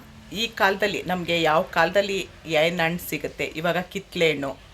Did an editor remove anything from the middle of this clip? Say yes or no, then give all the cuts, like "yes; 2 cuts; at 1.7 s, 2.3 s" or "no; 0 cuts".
no; 0 cuts